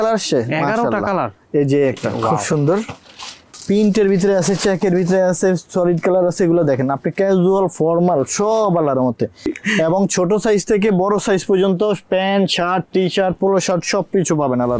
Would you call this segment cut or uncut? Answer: cut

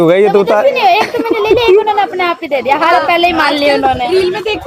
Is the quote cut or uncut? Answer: uncut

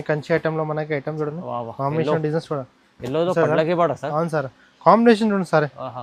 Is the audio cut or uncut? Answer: uncut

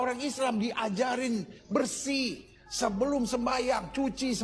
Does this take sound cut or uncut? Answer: uncut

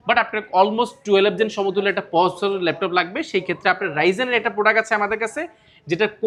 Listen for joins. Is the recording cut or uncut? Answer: uncut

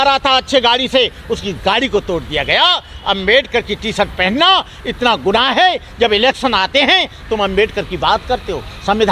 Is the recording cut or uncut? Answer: uncut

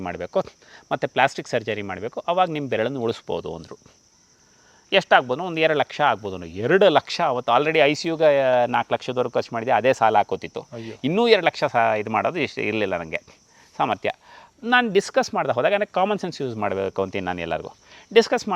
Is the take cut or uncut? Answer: uncut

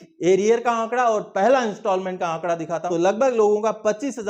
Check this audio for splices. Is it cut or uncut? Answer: cut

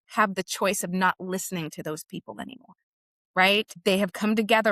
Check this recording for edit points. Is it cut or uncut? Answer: cut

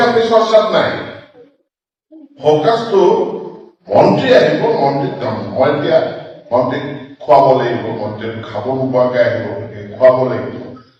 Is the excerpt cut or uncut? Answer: uncut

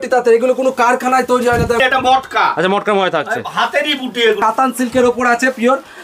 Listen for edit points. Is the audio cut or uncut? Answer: cut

